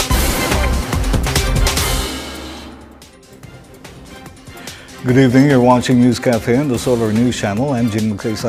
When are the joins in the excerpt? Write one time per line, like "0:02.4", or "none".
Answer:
none